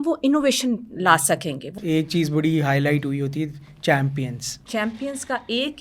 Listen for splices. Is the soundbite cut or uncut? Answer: cut